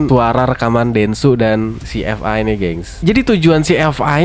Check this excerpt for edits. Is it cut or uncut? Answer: cut